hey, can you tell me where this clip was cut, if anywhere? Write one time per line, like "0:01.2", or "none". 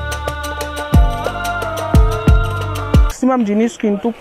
0:03.1